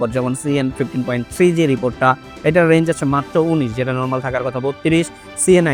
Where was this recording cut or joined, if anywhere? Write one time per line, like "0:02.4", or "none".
none